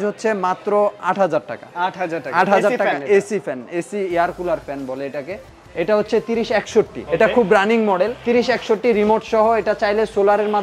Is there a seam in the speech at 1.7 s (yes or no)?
no